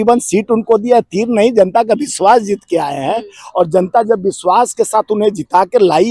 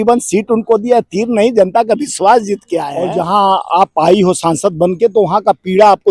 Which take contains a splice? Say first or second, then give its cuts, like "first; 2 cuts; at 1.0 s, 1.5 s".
second; 1 cut; at 3.0 s